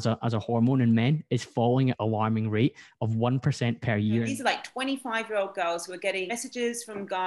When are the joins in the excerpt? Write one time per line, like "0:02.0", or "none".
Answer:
0:02.0
0:04.3
0:06.3